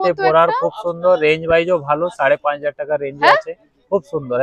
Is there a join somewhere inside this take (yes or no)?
no